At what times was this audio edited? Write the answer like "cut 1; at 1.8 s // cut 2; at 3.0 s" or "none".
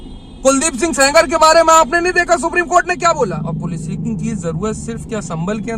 cut 1; at 3.5 s